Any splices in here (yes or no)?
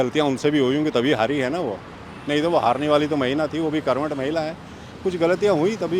no